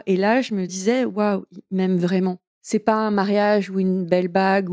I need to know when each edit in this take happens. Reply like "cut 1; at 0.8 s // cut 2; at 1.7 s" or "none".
cut 1; at 0.8 s // cut 2; at 2.5 s